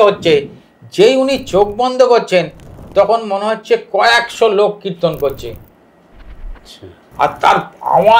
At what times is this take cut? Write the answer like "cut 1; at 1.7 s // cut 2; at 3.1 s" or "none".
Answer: none